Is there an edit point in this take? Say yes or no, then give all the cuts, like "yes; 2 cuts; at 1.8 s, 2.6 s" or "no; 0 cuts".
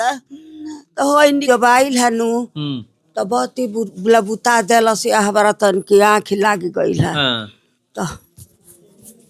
yes; 1 cut; at 1.4 s